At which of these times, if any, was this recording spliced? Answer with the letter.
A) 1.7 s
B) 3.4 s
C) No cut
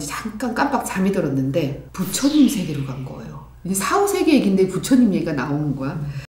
C